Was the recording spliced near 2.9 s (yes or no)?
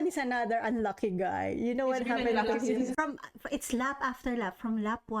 yes